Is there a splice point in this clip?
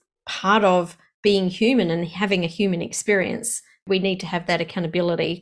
yes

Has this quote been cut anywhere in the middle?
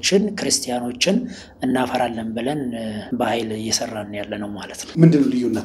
yes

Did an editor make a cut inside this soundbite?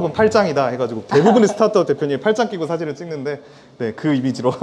no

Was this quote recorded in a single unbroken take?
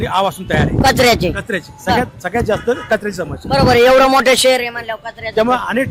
yes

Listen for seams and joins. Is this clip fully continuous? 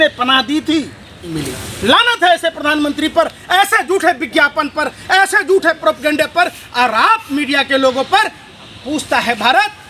no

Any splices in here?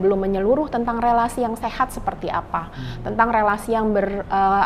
no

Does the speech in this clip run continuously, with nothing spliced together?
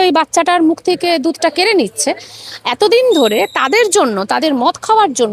yes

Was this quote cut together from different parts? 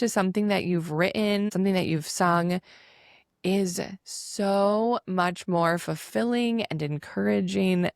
yes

